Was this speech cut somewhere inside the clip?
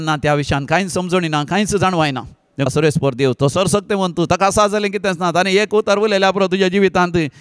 yes; 1 cut; at 2.7 s

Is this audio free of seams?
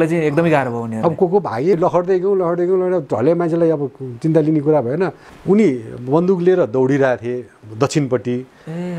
no; 2 cuts; at 1.8 s, 5.3 s

